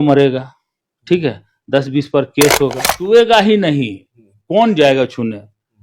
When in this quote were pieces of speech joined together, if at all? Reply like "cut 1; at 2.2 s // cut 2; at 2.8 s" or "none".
cut 1; at 2.9 s